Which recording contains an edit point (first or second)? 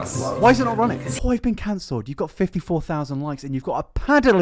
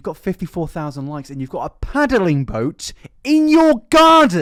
first